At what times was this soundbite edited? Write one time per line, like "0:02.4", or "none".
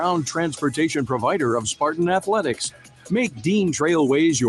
none